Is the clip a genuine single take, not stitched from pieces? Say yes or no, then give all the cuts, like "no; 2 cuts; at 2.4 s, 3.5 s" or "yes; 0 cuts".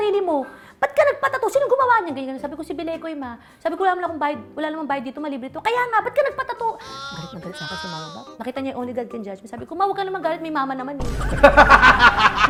yes; 0 cuts